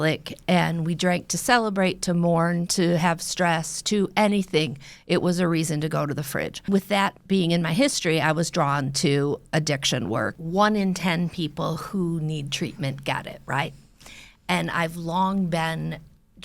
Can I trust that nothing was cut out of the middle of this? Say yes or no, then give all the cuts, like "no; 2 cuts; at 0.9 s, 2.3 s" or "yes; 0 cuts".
no; 2 cuts; at 6.6 s, 10.3 s